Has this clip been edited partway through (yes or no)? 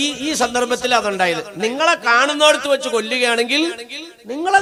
no